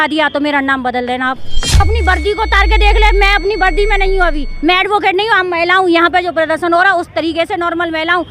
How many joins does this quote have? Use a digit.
1